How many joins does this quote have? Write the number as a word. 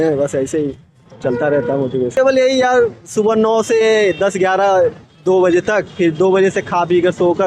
one